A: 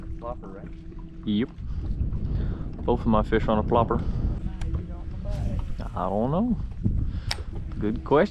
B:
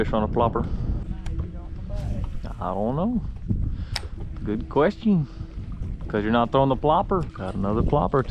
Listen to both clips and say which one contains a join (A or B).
B